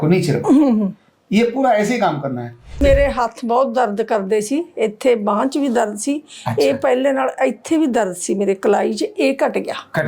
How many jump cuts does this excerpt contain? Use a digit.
1